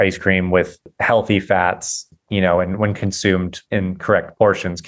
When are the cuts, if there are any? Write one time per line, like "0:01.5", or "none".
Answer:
0:00.9
0:02.0
0:03.6